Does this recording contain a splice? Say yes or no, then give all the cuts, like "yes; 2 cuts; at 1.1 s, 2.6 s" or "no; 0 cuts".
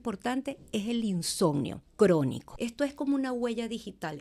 yes; 2 cuts; at 1.8 s, 2.5 s